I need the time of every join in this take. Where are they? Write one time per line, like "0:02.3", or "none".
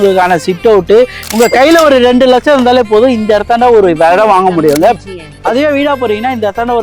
0:01.3
0:05.0